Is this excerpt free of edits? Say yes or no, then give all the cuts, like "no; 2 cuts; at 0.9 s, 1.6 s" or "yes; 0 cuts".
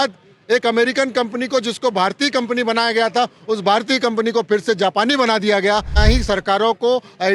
no; 1 cut; at 6.0 s